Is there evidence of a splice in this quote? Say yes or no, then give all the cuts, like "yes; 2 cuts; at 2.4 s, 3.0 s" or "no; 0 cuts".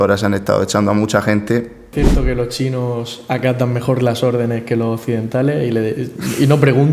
yes; 1 cut; at 1.8 s